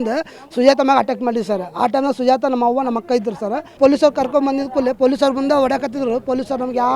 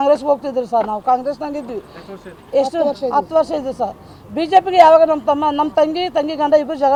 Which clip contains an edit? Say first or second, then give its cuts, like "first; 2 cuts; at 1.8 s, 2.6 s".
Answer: first; 1 cut; at 3.7 s